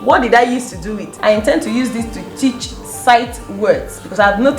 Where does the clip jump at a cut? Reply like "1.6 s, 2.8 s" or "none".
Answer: 1.1 s